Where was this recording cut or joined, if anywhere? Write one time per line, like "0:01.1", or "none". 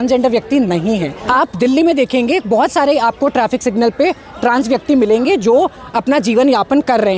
0:01.1